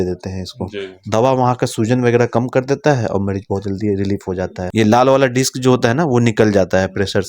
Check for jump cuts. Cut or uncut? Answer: cut